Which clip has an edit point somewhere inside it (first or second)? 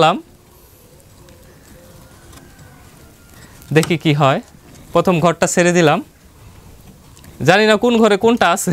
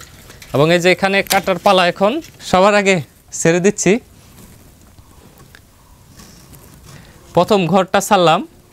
second